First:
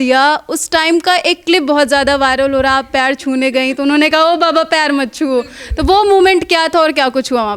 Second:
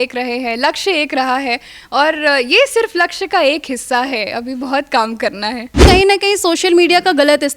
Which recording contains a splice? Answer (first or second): second